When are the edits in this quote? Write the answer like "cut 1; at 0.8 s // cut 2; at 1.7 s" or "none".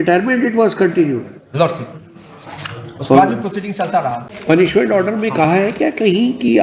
cut 1; at 4.3 s